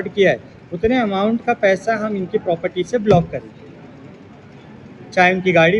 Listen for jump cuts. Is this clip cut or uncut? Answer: uncut